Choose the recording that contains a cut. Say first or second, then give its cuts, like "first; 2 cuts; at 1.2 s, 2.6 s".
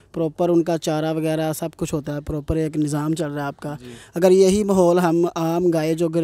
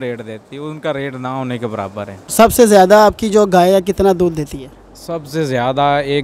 second; 1 cut; at 2.2 s